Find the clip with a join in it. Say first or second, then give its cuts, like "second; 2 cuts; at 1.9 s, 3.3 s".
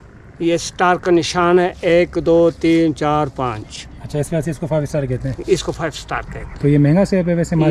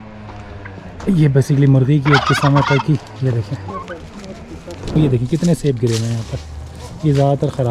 second; 1 cut; at 5.0 s